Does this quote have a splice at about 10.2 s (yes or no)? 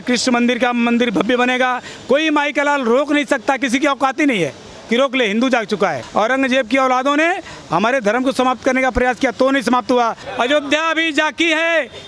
yes